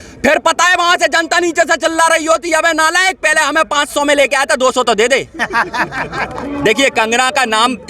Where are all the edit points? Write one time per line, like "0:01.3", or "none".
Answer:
0:06.4